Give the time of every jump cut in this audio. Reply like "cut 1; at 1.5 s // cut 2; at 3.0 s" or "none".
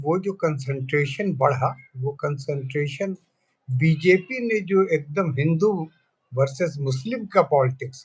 none